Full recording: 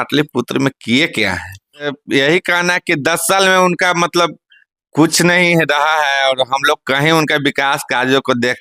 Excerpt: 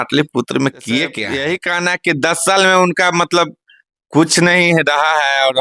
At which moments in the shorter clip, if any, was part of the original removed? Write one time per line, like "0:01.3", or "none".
0:01.2